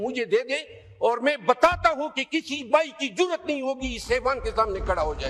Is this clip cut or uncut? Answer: uncut